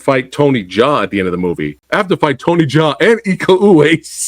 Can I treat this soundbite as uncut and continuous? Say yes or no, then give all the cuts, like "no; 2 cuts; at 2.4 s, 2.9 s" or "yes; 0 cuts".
no; 1 cut; at 1.7 s